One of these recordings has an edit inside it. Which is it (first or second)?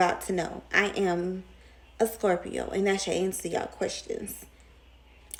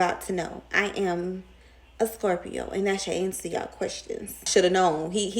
second